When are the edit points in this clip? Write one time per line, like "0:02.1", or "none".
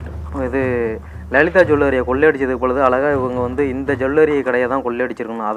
none